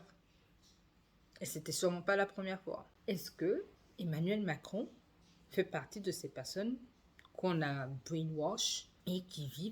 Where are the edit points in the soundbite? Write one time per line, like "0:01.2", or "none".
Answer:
0:02.9